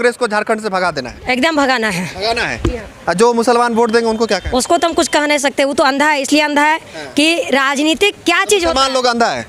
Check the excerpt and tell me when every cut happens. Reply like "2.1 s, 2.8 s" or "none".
none